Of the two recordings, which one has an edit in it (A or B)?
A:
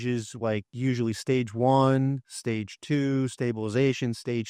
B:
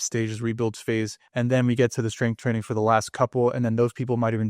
B